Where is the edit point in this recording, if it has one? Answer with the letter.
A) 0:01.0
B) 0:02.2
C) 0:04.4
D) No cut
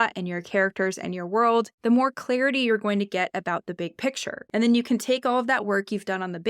C